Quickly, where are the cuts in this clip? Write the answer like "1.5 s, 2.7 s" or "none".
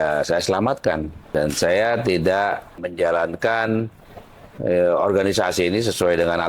1.2 s, 3.0 s